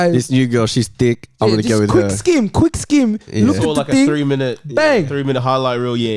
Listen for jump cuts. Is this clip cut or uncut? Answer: uncut